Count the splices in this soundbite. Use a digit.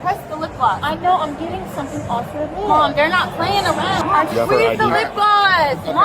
1